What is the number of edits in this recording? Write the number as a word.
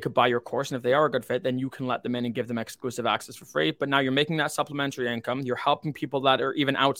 zero